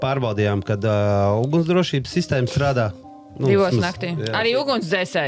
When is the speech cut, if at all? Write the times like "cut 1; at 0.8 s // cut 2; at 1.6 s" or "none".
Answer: cut 1; at 4.4 s